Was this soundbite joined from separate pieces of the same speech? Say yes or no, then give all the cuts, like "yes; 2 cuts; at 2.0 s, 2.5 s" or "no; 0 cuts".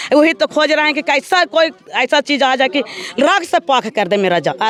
no; 0 cuts